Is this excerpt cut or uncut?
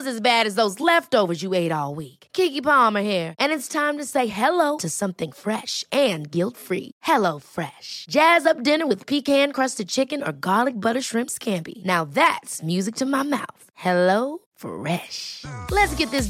uncut